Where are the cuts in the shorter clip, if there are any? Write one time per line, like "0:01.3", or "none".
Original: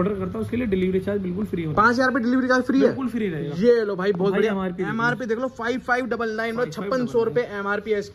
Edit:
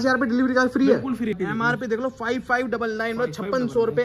0:01.4